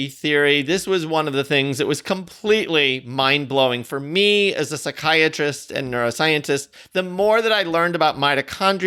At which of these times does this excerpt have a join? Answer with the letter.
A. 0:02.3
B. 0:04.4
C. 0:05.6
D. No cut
D